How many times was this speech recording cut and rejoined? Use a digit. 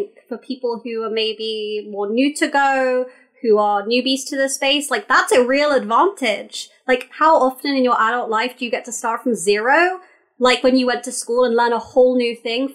0